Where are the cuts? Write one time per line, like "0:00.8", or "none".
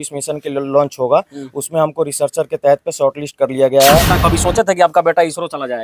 0:04.1